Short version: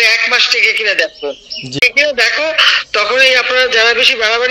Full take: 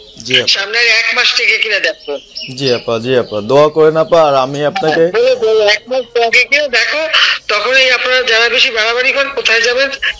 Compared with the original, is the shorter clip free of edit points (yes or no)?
no